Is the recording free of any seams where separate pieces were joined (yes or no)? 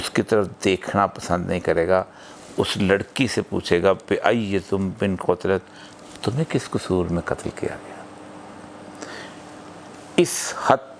yes